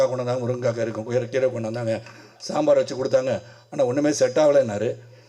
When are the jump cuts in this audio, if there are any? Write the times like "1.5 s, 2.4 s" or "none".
none